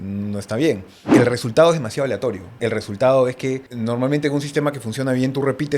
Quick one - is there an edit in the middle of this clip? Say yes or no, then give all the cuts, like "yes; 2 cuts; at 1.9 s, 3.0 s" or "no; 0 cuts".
yes; 3 cuts; at 1.1 s, 2.5 s, 3.7 s